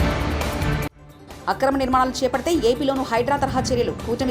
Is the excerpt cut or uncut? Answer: cut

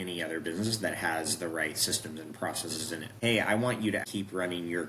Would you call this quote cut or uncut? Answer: cut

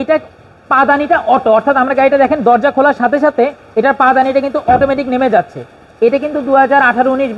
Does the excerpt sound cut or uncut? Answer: uncut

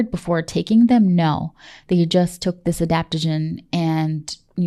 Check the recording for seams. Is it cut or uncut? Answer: uncut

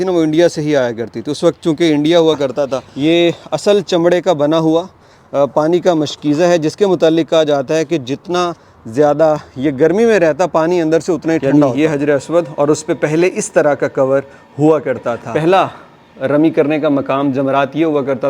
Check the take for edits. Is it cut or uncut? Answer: cut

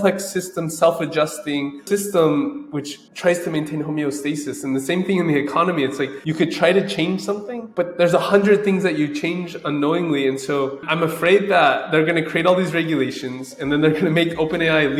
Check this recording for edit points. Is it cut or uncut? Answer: uncut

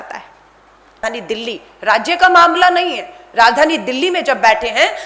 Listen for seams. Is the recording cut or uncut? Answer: cut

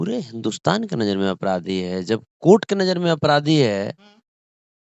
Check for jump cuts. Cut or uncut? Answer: uncut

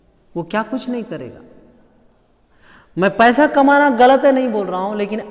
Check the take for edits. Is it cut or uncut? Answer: uncut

